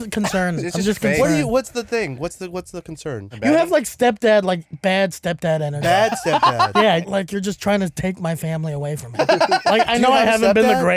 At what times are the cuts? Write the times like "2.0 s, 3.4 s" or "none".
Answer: 3.3 s, 7.0 s, 9.2 s